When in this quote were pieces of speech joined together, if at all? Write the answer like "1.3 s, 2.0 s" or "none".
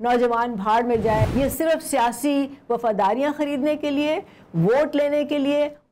1.3 s